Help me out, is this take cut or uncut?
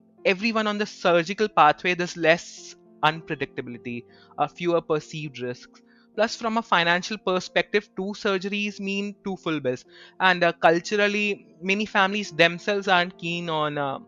uncut